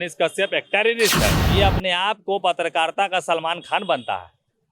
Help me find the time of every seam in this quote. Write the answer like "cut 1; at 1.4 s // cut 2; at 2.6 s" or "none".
cut 1; at 1.4 s